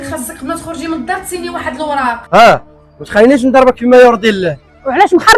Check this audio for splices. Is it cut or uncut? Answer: cut